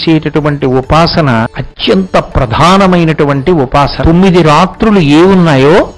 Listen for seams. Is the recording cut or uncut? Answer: cut